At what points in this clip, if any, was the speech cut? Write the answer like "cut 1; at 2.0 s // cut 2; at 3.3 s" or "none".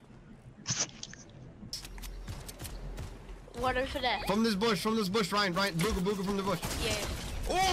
cut 1; at 1.8 s